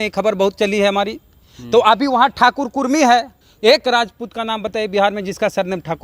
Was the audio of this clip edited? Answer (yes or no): yes